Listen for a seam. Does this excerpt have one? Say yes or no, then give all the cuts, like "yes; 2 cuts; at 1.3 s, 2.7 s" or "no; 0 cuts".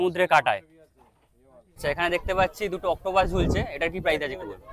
yes; 1 cut; at 1.8 s